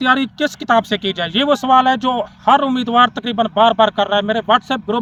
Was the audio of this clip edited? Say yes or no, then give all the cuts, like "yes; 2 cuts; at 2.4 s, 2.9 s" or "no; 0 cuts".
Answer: no; 0 cuts